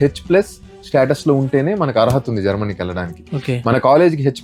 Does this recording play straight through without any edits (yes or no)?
yes